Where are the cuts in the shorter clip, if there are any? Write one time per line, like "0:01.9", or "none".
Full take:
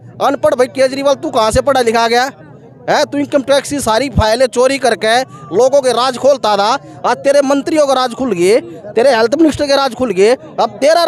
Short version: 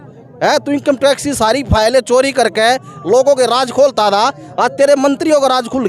none